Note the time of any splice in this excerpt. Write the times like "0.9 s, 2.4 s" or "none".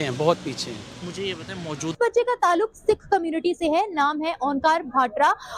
2.0 s